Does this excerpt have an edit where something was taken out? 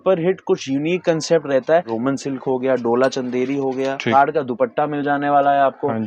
yes; 2 cuts; at 1.9 s, 4.1 s

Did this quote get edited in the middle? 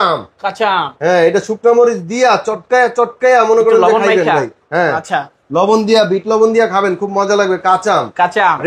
no; 0 cuts

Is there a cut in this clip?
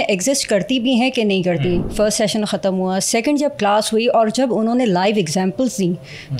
yes; 1 cut; at 1.9 s

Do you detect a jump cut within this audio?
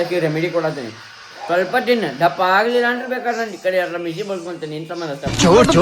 no; 0 cuts

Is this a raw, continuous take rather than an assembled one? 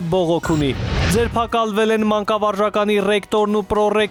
yes; 0 cuts

